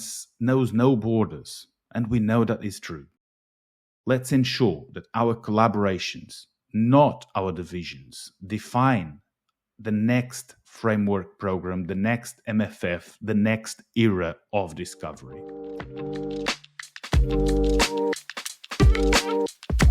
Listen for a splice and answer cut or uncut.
cut